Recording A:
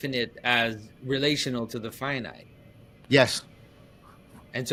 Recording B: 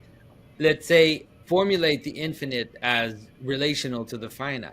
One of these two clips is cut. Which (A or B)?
B